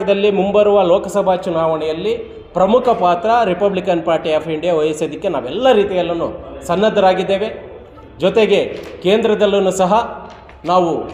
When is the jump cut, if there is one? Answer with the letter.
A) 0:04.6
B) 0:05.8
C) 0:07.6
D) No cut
D